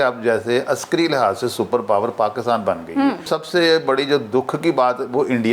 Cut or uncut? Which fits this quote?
cut